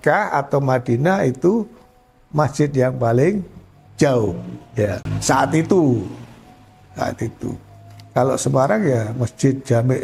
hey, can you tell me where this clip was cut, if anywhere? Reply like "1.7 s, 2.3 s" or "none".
5.1 s